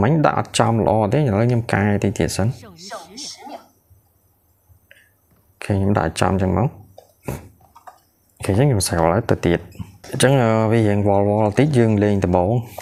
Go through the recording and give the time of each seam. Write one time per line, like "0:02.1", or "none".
none